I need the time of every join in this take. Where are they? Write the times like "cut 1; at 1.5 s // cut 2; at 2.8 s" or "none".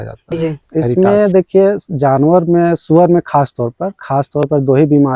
cut 1; at 0.9 s